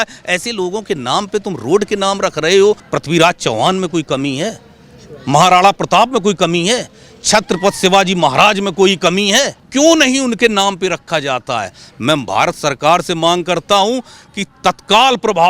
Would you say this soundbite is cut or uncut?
cut